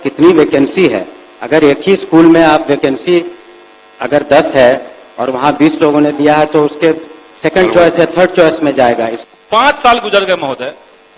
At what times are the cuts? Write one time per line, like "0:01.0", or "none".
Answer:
0:09.2